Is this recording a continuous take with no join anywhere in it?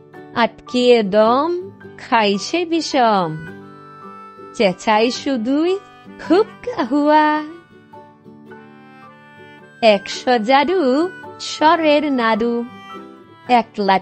yes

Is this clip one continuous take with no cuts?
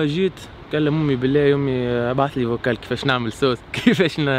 yes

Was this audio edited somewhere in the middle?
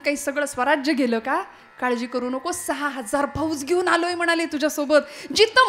no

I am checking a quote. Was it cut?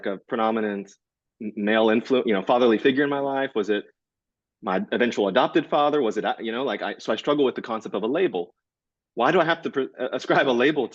no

